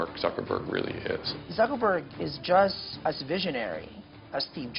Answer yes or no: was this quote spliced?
yes